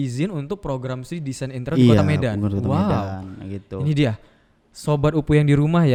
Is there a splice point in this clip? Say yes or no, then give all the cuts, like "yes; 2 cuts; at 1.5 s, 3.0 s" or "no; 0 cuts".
no; 0 cuts